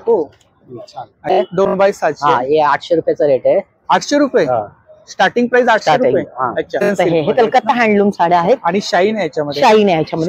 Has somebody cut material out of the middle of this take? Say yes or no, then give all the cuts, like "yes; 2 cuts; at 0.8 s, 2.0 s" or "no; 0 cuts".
yes; 2 cuts; at 1.4 s, 6.9 s